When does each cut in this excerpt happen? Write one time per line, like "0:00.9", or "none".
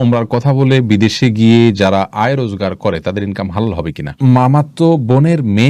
0:04.2